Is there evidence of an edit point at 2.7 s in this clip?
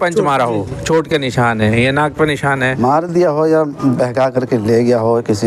yes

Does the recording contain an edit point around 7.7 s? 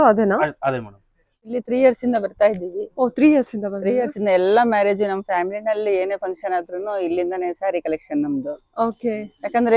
no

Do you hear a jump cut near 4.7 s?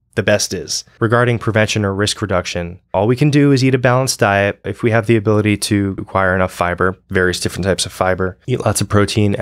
yes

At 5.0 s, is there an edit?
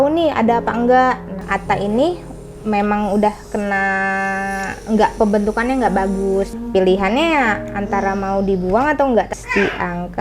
no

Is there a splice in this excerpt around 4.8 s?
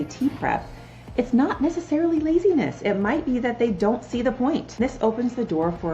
yes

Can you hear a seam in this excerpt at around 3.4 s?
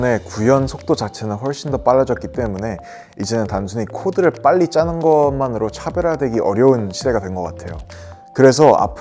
no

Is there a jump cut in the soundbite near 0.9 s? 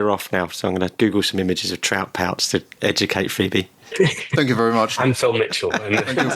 yes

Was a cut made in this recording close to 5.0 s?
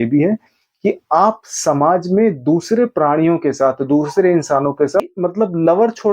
yes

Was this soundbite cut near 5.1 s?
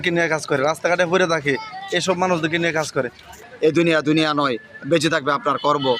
no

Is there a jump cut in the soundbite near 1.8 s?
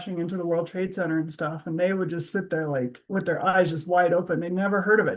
no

